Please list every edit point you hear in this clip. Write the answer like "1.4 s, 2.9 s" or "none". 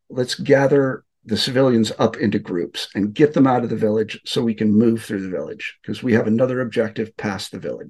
1.2 s